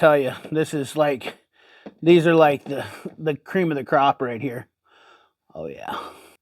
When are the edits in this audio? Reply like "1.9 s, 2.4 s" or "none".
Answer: none